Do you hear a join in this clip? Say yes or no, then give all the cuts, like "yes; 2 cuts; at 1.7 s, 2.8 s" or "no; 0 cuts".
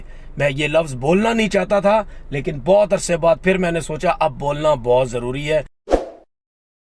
yes; 1 cut; at 5.7 s